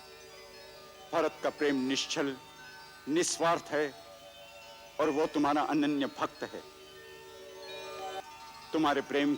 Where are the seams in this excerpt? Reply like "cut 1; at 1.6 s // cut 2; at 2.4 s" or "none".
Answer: cut 1; at 8.2 s